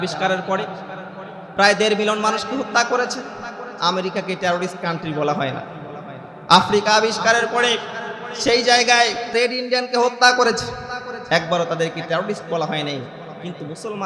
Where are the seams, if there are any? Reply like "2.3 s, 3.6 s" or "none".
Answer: 9.3 s